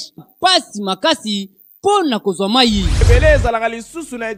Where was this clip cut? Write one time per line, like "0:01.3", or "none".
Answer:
0:03.0

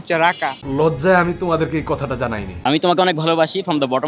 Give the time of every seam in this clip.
0:02.6

